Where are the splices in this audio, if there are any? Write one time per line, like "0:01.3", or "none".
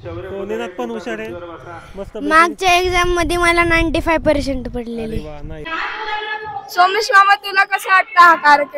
0:05.6

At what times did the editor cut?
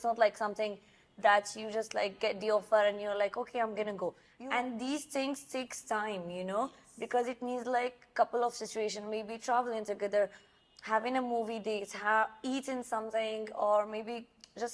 0:04.3

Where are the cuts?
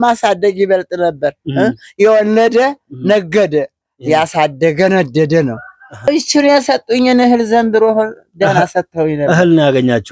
0:05.8

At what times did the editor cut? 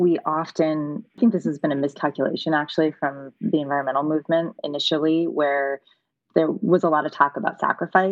0:01.2

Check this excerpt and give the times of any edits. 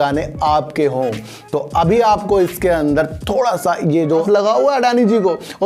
0:04.1

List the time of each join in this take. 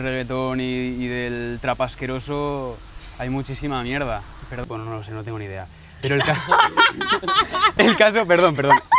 0:04.6

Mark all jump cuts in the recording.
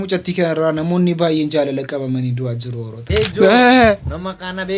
0:03.0

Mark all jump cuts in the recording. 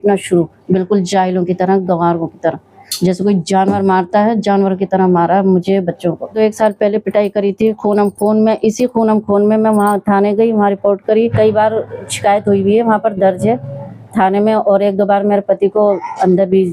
0:06.3
0:11.2

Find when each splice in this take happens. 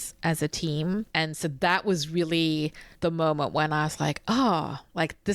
0:01.1
0:02.8

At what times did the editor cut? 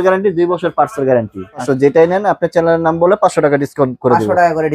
0:01.6

